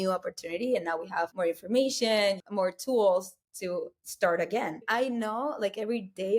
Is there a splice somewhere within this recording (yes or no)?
yes